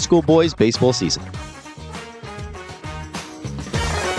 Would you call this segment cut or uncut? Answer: cut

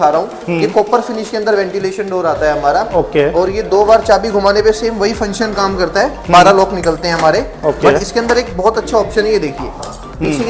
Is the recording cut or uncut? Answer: uncut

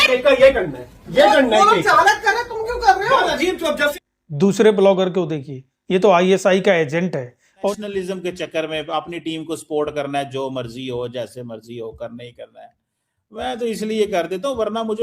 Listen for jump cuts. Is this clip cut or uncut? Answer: cut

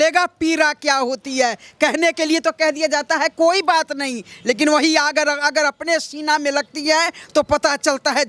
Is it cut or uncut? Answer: uncut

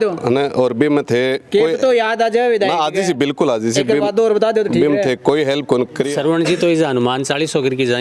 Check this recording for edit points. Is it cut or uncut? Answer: cut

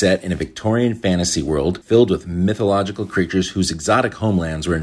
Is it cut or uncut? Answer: cut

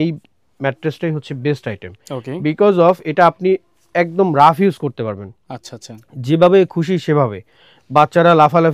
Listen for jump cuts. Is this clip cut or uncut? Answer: uncut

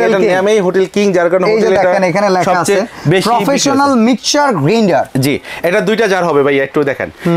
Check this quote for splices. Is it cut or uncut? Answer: uncut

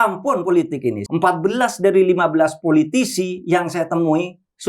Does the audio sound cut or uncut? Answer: cut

